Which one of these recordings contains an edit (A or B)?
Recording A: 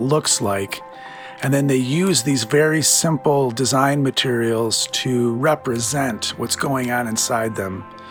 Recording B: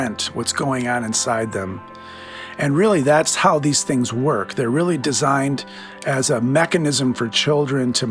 B